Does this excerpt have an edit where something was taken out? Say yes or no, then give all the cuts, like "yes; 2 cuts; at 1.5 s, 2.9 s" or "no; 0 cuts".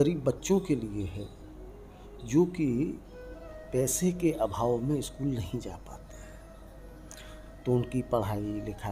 no; 0 cuts